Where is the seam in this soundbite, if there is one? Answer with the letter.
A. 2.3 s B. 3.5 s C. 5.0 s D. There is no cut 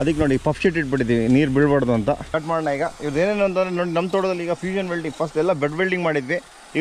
A